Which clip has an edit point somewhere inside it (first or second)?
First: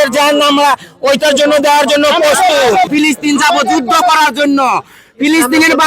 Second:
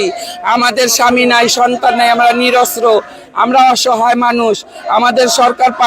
first